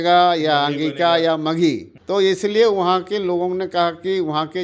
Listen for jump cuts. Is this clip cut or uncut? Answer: cut